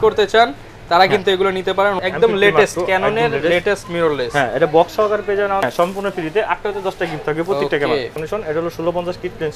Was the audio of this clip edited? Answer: yes; 3 cuts; at 2.0 s, 5.6 s, 8.2 s

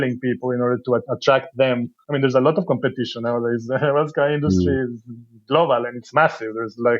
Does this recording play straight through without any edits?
no; 2 cuts; at 1.1 s, 2.0 s

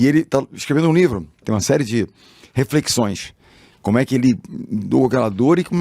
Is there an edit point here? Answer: yes; 1 cut; at 1.4 s

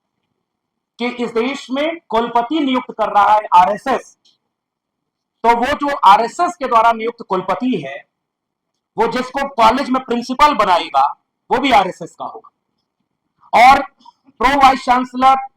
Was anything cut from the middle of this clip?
no; 0 cuts

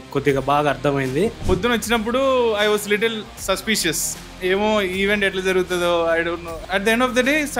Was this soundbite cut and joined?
yes; 2 cuts; at 1.4 s, 6.6 s

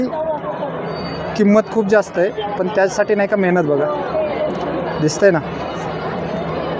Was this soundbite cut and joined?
no; 0 cuts

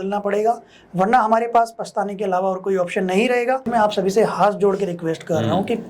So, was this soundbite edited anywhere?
yes; 1 cut; at 3.7 s

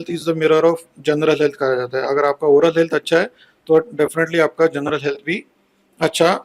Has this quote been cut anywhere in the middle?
no; 0 cuts

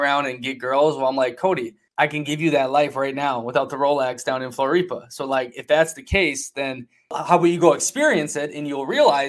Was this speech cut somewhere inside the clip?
yes; 1 cut; at 7.2 s

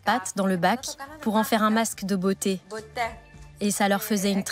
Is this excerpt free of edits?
no; 1 cut; at 3.0 s

